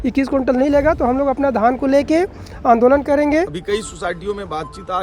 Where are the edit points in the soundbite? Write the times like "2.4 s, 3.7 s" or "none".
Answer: 3.6 s